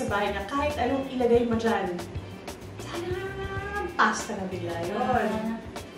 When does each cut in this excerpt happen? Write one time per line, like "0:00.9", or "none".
none